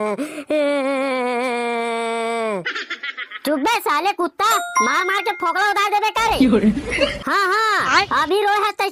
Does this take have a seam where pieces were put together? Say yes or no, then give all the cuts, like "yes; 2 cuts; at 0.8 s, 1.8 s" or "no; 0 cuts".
no; 0 cuts